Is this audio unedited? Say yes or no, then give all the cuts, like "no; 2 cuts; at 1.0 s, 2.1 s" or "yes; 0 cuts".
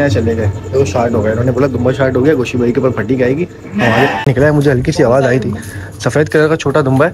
no; 1 cut; at 4.2 s